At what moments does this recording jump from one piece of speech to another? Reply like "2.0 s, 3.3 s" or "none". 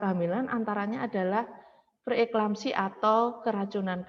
none